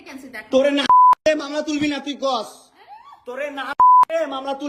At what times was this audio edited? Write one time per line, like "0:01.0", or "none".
none